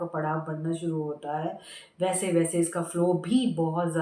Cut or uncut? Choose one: uncut